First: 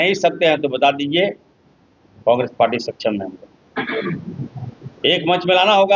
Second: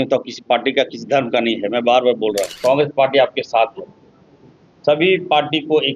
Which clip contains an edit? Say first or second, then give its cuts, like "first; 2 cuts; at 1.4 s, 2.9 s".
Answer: second; 1 cut; at 2.5 s